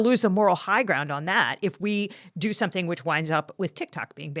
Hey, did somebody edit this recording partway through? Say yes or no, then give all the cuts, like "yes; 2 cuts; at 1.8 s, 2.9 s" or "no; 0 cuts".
yes; 1 cut; at 3.5 s